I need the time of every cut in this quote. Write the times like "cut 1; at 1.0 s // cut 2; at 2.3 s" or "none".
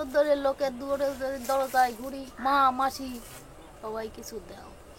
cut 1; at 2.3 s